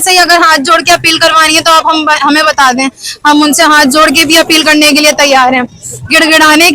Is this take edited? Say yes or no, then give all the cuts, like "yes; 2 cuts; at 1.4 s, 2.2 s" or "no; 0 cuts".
yes; 1 cut; at 4.9 s